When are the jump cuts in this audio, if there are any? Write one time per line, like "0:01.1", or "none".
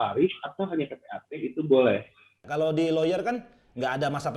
0:02.4